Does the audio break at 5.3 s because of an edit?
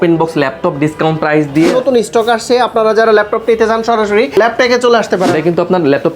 yes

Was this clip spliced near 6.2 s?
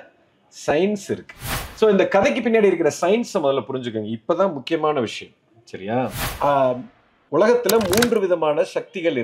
yes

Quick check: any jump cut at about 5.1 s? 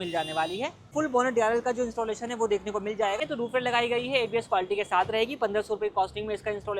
no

